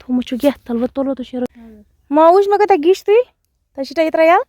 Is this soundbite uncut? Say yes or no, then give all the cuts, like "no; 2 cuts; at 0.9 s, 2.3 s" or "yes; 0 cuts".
no; 1 cut; at 1.5 s